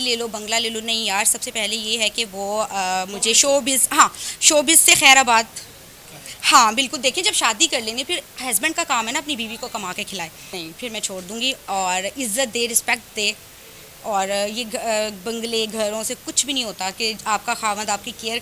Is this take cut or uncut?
cut